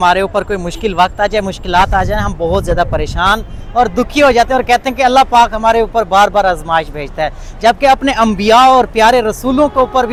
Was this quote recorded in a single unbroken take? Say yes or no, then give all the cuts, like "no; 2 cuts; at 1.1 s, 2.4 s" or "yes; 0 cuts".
yes; 0 cuts